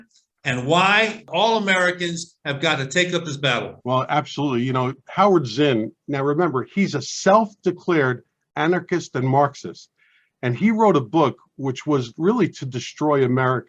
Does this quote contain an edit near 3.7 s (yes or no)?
yes